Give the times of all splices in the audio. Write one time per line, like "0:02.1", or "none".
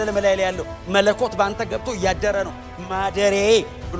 none

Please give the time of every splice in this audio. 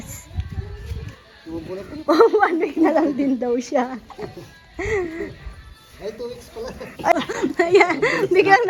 none

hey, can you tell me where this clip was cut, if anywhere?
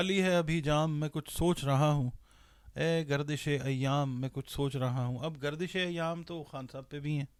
none

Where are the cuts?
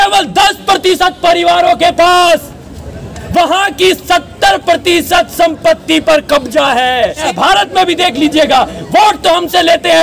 0:07.3

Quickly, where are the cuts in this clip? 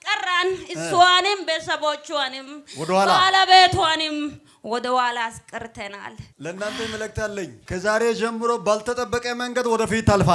0:07.6

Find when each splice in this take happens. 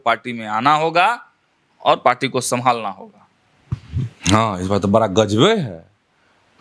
none

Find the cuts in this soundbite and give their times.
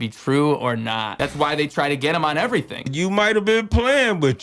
0:01.1
0:02.9

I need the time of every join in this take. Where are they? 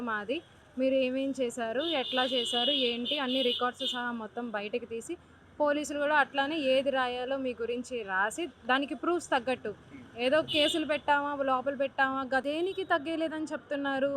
0:12.4

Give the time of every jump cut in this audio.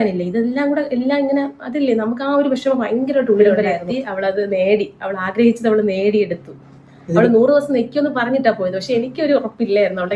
0:03.6

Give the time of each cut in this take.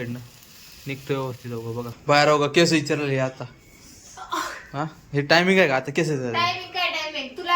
0:01.9

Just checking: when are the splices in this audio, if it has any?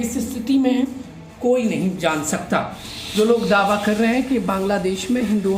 0:03.1

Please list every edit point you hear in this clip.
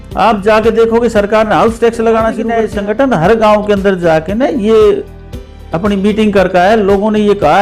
0:02.5

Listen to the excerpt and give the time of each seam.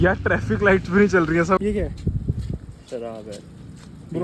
0:01.6

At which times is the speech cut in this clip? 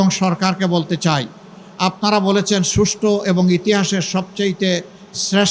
none

